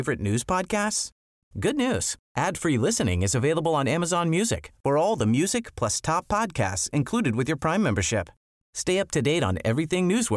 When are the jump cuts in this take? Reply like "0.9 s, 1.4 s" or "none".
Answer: none